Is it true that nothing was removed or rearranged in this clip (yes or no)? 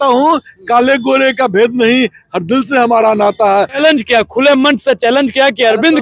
no